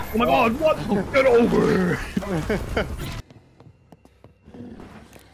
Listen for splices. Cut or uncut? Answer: cut